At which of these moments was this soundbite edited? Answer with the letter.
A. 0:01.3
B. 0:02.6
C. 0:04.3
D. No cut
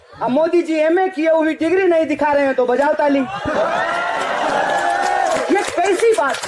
D